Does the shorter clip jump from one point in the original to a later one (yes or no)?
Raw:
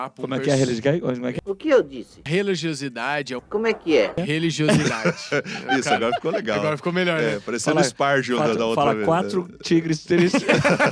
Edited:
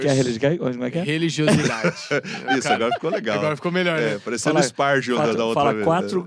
yes